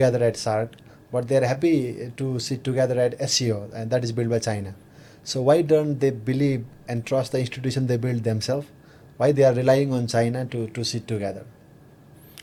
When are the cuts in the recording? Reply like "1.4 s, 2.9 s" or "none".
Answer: none